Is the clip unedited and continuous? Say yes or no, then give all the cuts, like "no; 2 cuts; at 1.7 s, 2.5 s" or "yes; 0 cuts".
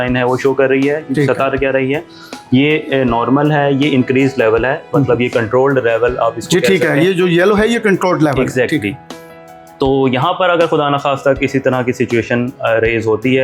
yes; 0 cuts